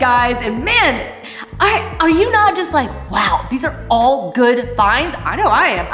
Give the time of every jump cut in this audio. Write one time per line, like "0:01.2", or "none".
none